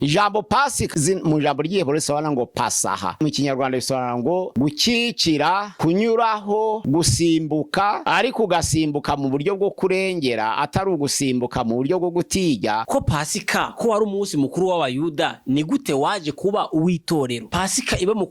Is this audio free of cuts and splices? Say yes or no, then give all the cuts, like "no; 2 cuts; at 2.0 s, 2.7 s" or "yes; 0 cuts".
no; 8 cuts; at 0.9 s, 3.2 s, 4.5 s, 5.7 s, 6.8 s, 8.0 s, 12.8 s, 17.5 s